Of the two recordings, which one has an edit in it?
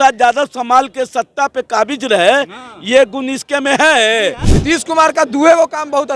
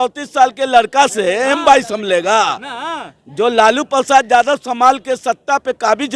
first; 1 cut; at 4.5 s

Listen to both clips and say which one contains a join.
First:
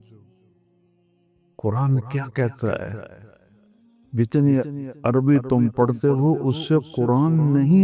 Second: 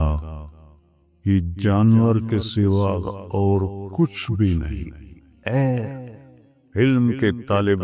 second; 1 cut; at 5.3 s

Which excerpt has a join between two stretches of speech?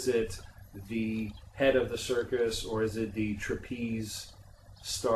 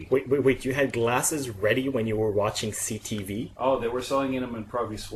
first; 1 cut; at 3.5 s

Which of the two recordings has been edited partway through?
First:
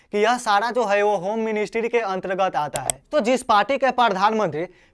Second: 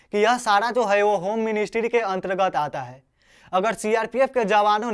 first; 1 cut; at 3.1 s

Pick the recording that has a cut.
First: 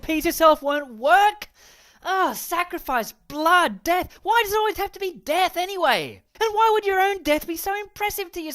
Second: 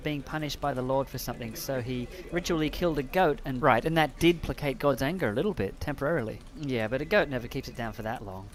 first; 1 cut; at 4.2 s

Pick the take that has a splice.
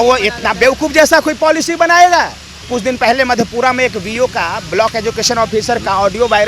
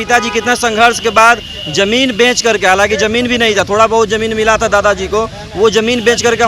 first; 1 cut; at 2.7 s

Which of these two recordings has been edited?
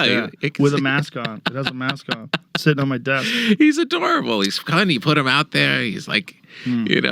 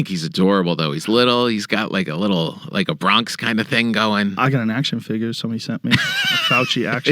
second; 1 cut; at 4.3 s

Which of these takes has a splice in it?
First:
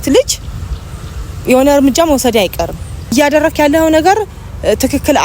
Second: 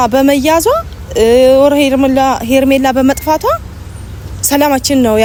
first; 1 cut; at 3.1 s

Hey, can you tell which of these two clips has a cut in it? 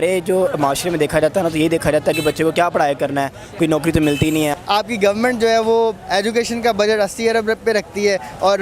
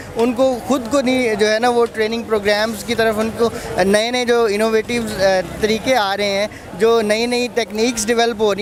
first; 1 cut; at 4.5 s

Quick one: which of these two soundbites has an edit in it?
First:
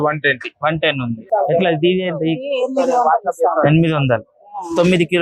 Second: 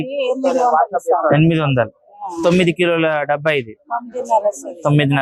first; 1 cut; at 1.3 s

